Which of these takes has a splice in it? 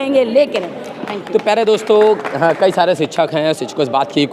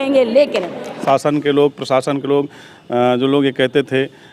second; 1 cut; at 1.0 s

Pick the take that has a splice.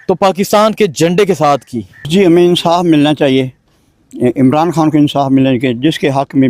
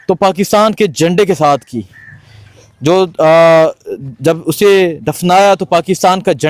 first; 1 cut; at 2.1 s

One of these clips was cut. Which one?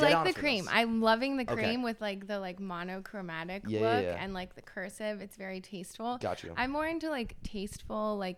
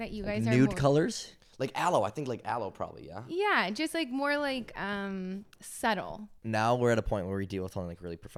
second; 1 cut; at 6.4 s

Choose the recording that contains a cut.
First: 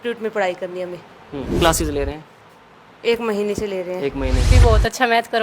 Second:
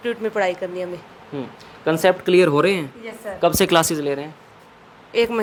first; 2 cuts; at 1.6 s, 4.5 s

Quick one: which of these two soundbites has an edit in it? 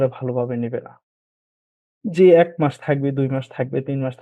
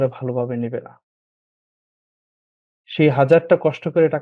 first; 1 cut; at 1.8 s

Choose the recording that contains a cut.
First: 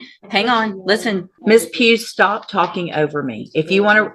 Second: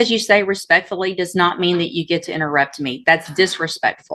first; 1 cut; at 1.3 s

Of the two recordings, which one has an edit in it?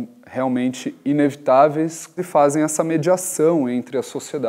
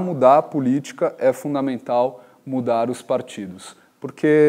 first; 1 cut; at 2.1 s

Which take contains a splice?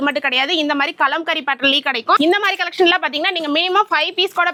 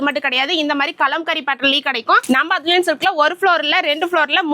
second; 1 cut; at 2.2 s

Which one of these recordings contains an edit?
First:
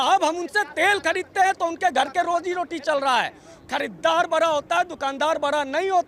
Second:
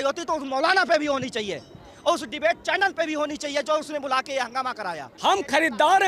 second; 1 cut; at 5.1 s

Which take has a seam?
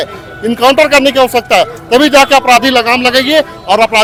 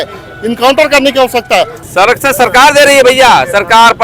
second; 1 cut; at 1.8 s

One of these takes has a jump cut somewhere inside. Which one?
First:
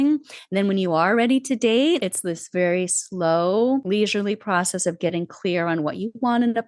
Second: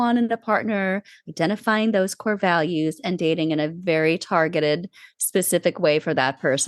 first; 2 cuts; at 2.0 s, 3.8 s

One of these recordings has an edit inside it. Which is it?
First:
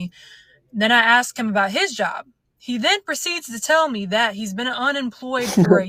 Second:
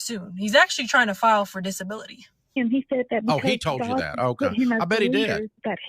second; 1 cut; at 2.6 s

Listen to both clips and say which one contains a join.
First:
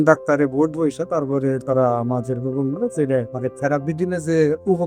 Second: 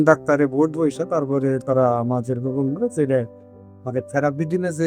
first; 1 cut; at 3.3 s

